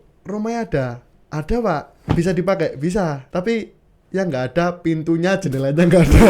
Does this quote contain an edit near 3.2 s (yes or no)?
yes